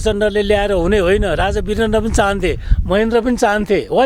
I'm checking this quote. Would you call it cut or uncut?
uncut